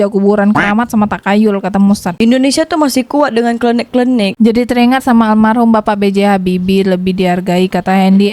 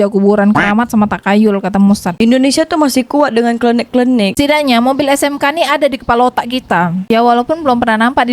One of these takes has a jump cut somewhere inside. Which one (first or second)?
second